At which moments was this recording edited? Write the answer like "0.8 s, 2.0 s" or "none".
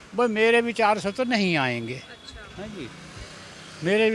none